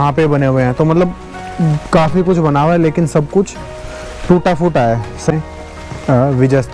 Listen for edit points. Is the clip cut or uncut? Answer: cut